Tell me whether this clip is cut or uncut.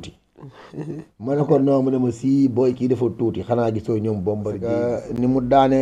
cut